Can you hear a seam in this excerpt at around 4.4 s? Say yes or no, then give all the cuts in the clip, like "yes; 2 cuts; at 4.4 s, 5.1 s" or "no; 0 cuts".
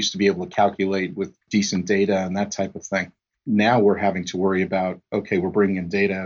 no; 1 cut; at 1.5 s